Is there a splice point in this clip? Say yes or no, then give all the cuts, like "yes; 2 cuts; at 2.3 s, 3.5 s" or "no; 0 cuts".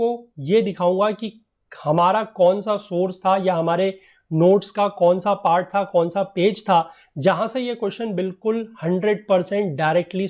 no; 0 cuts